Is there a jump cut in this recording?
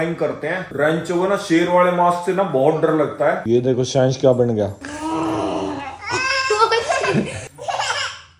yes; 1 cut; at 3.4 s

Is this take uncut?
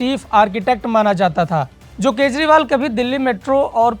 no; 1 cut; at 1.8 s

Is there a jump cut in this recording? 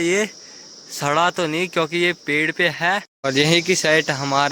yes; 1 cut; at 3.1 s

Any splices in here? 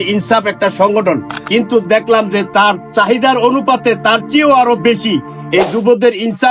yes; 1 cut; at 1.3 s

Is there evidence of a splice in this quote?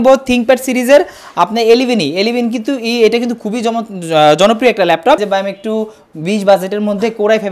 yes; 1 cut; at 5.2 s

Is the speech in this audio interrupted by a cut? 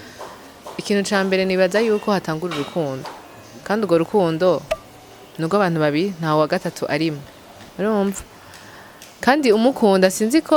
no; 0 cuts

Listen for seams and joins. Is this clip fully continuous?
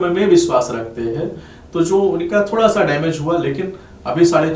yes; 0 cuts

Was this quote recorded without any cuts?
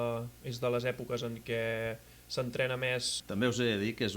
no; 1 cut; at 3.2 s

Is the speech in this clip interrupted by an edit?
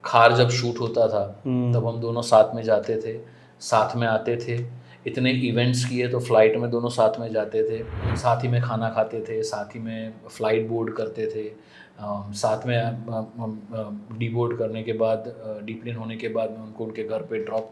yes; 1 cut; at 8.0 s

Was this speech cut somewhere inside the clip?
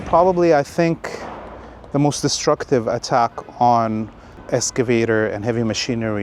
yes; 1 cut; at 4.4 s

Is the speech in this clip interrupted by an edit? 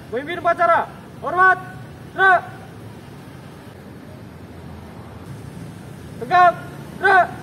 yes; 2 cuts; at 3.7 s, 5.3 s

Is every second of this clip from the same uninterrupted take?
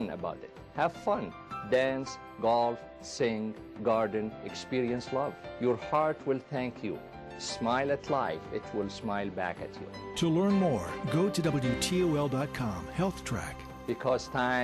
yes; 0 cuts

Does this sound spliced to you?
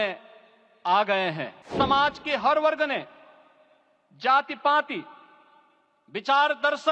yes; 1 cut; at 1.7 s

